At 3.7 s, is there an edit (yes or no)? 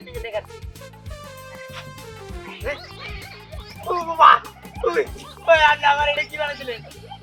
no